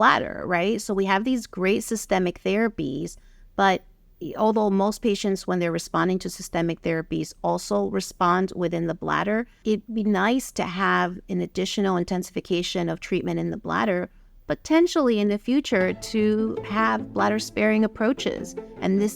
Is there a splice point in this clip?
no; 0 cuts

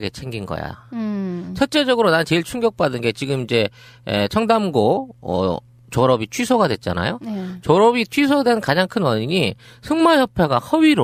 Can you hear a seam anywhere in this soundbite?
no; 0 cuts

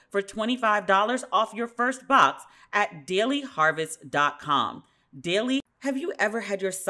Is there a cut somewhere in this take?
yes; 1 cut; at 5.7 s

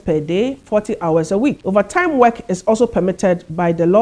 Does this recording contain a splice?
yes; 1 cut; at 1.6 s

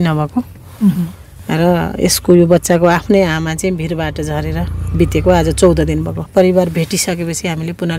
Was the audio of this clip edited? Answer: yes; 1 cut; at 6.3 s

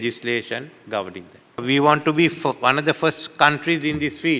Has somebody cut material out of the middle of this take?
no; 0 cuts

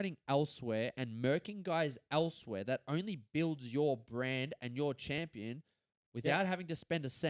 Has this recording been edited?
no; 0 cuts

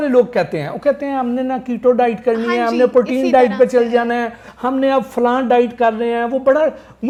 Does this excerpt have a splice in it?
no; 0 cuts

